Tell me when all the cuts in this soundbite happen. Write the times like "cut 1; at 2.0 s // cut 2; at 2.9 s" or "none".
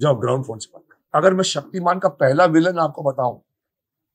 cut 1; at 1.0 s